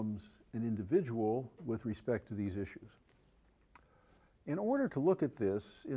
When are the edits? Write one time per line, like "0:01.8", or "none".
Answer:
0:02.0